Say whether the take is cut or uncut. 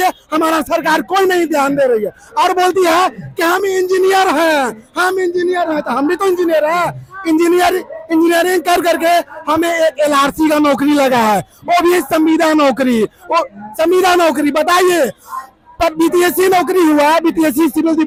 uncut